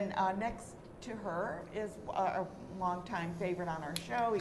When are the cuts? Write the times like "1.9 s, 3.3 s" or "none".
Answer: none